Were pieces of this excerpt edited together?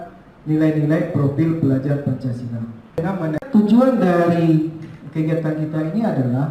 yes; 1 cut; at 3.3 s

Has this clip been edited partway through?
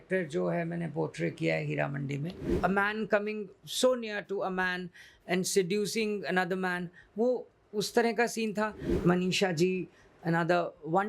yes; 2 cuts; at 2.4 s, 8.9 s

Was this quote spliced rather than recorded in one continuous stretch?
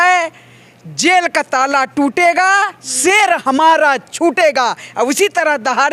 no; 0 cuts

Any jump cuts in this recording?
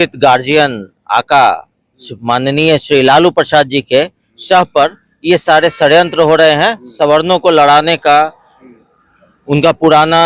no; 0 cuts

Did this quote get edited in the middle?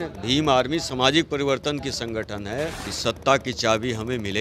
yes; 1 cut; at 2.9 s

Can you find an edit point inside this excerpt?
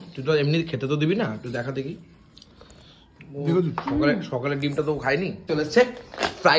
yes; 1 cut; at 5.4 s

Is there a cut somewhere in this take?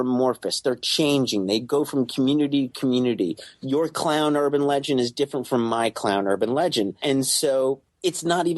yes; 1 cut; at 7.0 s

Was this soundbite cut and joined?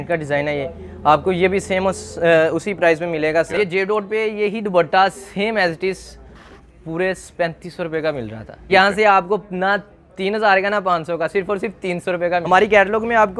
yes; 3 cuts; at 3.5 s, 8.5 s, 12.4 s

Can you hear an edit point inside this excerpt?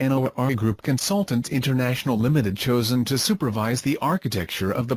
no; 0 cuts

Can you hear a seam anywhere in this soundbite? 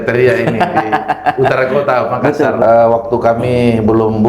yes; 1 cut; at 2.6 s

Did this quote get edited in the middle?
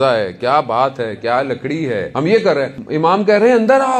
yes; 2 cuts; at 2.1 s, 3.2 s

